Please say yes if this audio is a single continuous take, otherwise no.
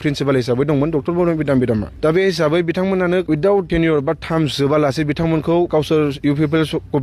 no